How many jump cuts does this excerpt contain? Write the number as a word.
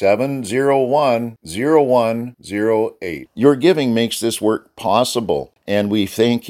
one